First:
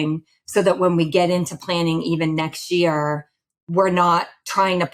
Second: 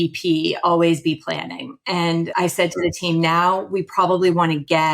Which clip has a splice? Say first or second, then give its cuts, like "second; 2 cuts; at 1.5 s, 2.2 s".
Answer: second; 1 cut; at 2.3 s